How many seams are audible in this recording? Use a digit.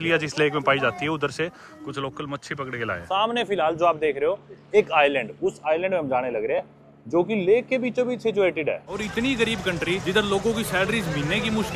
3